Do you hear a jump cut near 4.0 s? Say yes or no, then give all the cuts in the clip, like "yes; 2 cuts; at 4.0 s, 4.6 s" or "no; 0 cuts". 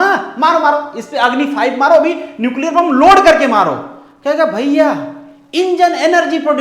no; 0 cuts